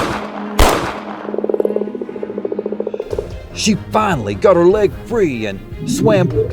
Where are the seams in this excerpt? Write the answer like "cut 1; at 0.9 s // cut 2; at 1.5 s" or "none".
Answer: cut 1; at 1.1 s // cut 2; at 2.9 s

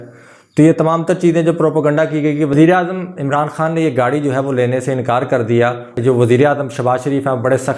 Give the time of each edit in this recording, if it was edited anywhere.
cut 1; at 2.5 s // cut 2; at 5.9 s

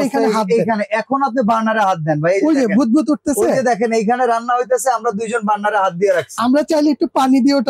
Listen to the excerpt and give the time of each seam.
none

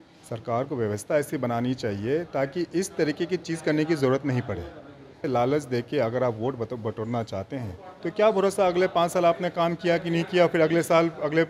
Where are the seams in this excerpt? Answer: cut 1; at 5.2 s

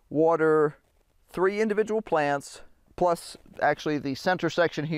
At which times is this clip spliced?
cut 1; at 2.8 s

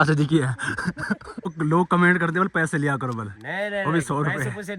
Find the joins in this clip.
cut 1; at 1.4 s

